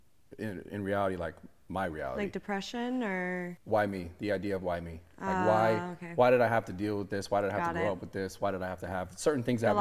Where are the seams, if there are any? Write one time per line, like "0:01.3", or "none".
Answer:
0:03.4